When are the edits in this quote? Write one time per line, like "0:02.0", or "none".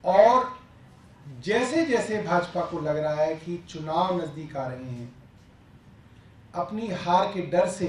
none